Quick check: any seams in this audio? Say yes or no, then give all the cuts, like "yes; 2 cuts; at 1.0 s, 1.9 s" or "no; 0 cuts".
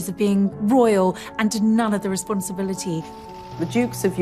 no; 0 cuts